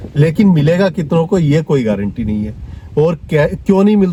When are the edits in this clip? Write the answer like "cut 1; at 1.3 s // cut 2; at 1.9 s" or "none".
none